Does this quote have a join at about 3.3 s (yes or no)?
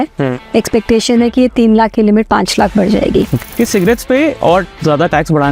yes